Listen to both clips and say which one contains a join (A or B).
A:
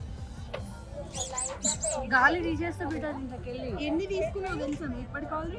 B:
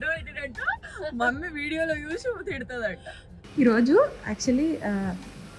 B